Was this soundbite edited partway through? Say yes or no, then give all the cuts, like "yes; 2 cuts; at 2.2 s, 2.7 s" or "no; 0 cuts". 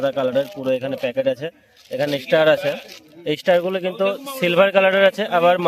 no; 0 cuts